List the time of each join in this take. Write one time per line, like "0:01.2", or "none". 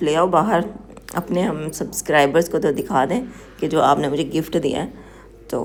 none

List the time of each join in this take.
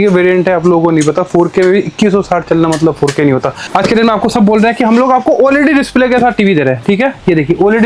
0:03.6

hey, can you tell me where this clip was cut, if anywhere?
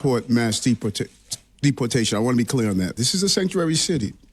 0:03.0

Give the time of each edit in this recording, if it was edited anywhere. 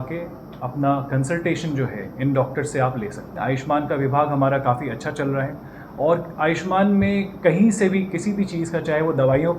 0:03.3

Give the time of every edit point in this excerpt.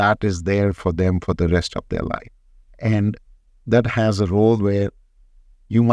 none

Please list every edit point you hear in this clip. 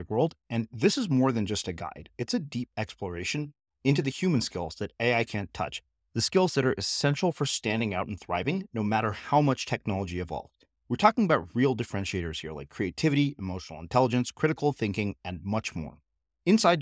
none

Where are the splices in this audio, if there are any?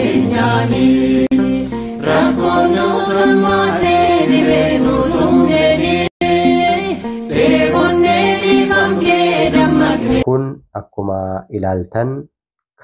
0:10.2

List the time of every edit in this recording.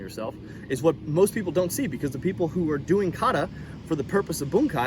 none

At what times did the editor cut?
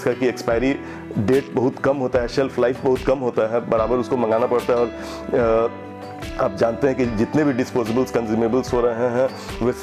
none

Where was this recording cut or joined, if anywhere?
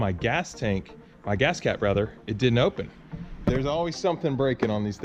0:03.4

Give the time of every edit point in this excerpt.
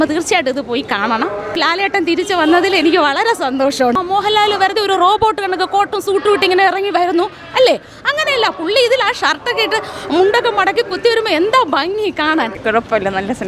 0:01.6
0:04.0
0:12.6

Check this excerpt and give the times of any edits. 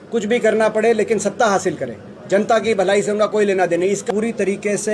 0:04.0

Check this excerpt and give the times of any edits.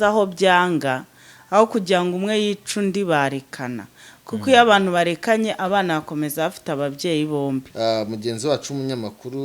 0:07.7

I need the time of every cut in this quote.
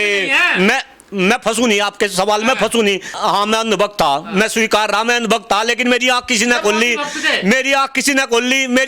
0:03.1

